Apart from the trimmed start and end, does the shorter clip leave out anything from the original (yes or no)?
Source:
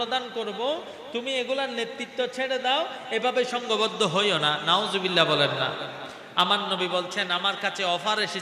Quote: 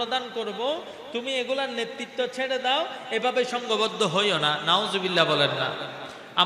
no